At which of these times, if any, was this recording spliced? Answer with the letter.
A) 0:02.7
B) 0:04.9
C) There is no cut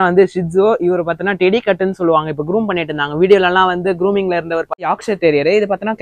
B